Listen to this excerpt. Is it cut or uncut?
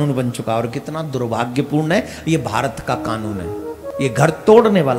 cut